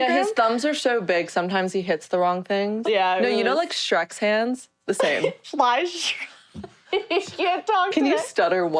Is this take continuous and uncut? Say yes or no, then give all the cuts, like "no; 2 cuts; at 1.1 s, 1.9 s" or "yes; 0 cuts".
no; 2 cuts; at 2.8 s, 5.4 s